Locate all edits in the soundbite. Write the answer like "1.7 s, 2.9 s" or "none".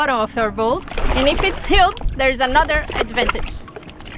0.9 s